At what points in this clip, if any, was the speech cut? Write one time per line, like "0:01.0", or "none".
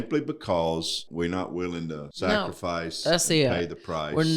0:01.1
0:02.1